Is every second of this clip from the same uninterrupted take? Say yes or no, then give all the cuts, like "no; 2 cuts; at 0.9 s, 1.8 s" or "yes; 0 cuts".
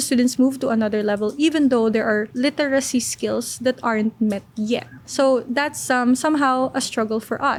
yes; 0 cuts